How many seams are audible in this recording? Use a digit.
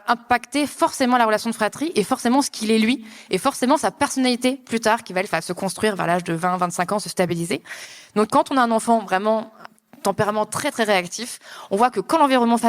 1